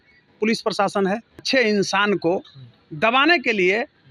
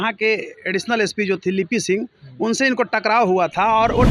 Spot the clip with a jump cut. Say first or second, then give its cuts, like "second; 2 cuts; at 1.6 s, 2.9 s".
first; 1 cut; at 1.4 s